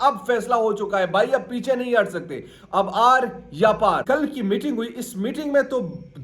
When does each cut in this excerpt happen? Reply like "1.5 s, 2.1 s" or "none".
4.0 s